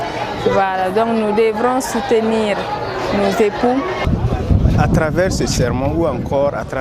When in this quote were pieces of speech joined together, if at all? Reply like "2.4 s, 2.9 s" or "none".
4.4 s